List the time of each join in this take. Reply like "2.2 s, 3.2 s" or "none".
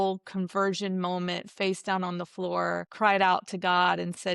2.9 s